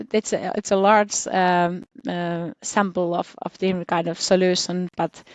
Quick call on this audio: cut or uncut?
uncut